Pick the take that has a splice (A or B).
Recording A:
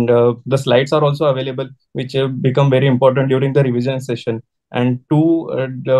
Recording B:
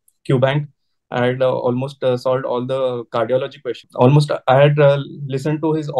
B